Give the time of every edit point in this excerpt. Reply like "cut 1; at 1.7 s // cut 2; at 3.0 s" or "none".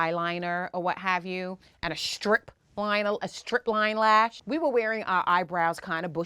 cut 1; at 4.4 s